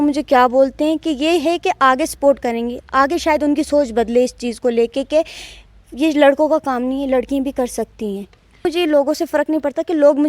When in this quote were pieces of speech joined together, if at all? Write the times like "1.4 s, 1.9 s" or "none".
8.7 s

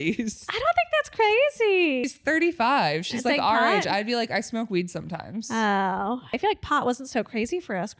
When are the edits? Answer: 2.0 s, 6.3 s

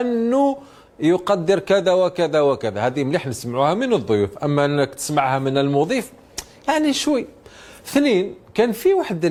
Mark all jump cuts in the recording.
none

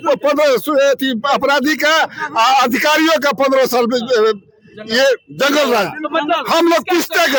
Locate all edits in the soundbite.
none

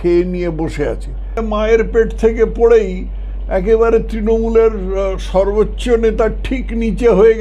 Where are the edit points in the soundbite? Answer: 1.4 s

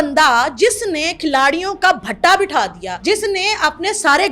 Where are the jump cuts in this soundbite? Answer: 2.9 s

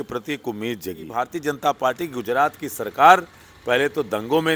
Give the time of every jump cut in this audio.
1.1 s

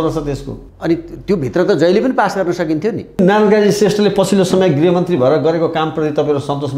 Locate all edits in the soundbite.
3.2 s

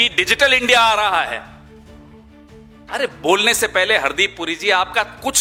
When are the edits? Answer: none

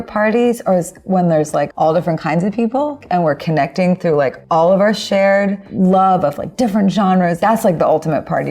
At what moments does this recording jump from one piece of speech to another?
1.7 s, 3.0 s, 4.4 s, 7.4 s

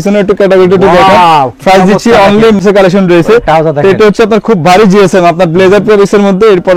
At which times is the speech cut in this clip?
2.6 s

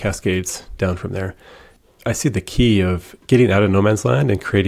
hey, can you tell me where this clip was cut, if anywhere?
1.7 s, 3.1 s

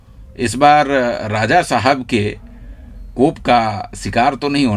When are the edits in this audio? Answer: none

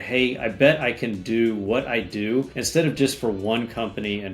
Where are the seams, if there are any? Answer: 2.6 s

